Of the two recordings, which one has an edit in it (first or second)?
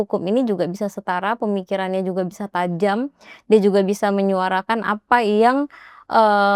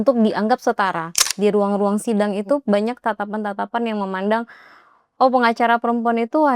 second